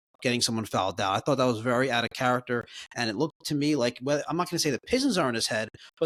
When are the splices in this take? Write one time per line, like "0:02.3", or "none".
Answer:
none